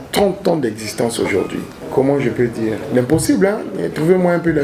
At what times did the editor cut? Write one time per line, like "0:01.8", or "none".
0:01.8